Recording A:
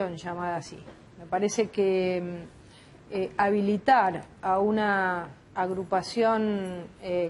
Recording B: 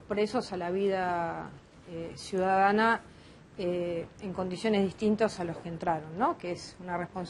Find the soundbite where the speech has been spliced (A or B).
A